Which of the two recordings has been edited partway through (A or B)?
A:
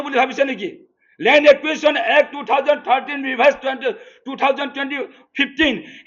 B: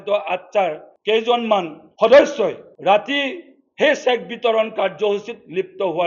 B